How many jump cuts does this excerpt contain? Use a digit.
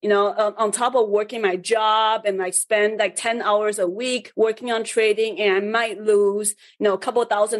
0